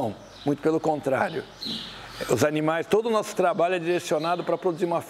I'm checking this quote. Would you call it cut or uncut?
uncut